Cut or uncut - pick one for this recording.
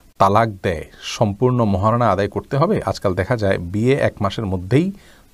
uncut